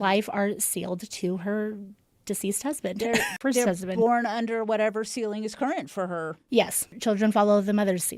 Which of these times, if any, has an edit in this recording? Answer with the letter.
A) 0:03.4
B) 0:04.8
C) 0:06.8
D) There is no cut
A